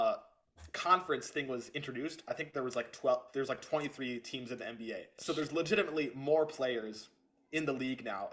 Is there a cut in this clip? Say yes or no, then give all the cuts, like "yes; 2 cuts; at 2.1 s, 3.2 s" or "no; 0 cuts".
yes; 1 cut; at 5.1 s